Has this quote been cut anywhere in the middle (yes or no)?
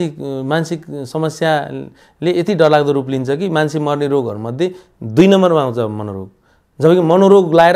no